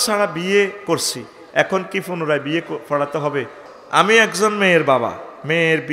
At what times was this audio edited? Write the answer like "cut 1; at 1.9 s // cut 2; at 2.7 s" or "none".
cut 1; at 3.6 s